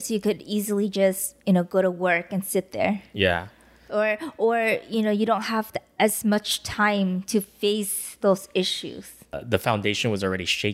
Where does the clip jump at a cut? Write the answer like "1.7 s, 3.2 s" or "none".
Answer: 9.3 s